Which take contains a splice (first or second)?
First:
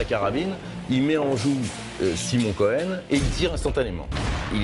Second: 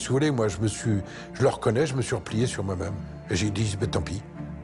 second